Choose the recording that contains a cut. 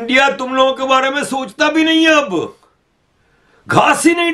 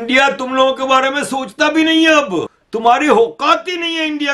second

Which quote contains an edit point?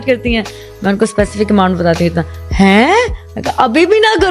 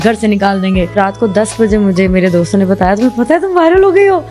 second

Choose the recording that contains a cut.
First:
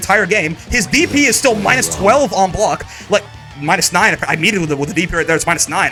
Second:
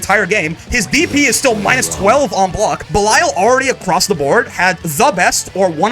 second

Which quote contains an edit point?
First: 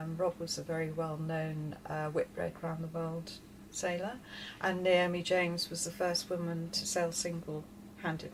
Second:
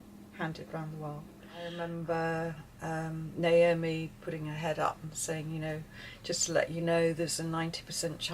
second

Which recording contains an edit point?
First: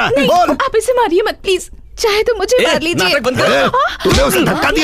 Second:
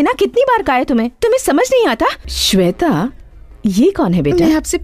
second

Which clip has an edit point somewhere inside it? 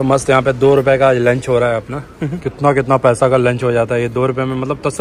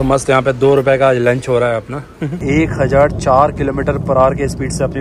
second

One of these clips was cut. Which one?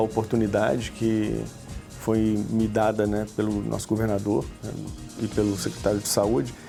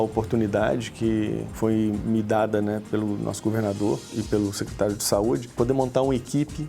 second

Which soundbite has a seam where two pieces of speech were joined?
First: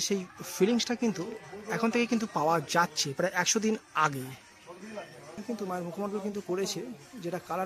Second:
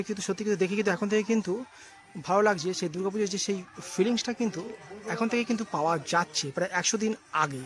first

